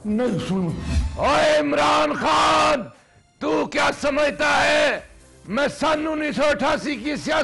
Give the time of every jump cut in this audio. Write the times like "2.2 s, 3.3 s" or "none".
0.9 s